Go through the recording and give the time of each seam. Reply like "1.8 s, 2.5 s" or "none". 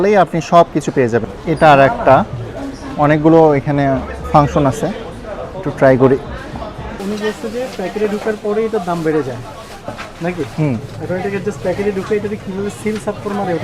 1.3 s, 7.0 s